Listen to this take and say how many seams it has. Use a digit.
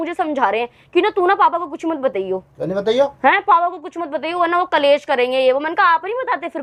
0